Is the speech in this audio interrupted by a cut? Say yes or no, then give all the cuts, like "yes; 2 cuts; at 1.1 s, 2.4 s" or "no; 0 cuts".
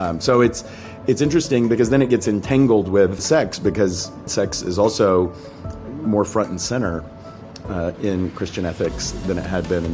yes; 2 cuts; at 3.2 s, 4.3 s